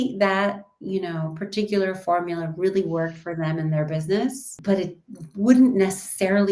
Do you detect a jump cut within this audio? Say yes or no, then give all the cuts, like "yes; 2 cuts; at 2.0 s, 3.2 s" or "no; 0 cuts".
yes; 1 cut; at 4.5 s